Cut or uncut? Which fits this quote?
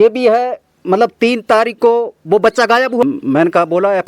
cut